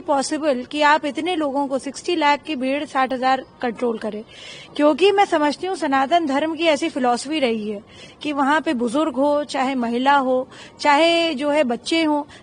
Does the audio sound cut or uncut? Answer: uncut